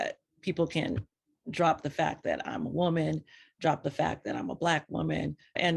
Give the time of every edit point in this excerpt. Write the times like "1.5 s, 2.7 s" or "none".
none